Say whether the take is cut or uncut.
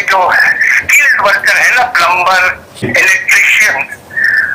cut